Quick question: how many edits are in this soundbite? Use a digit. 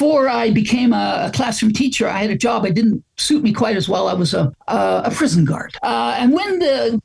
2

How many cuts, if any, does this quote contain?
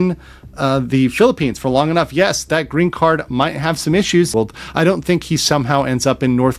1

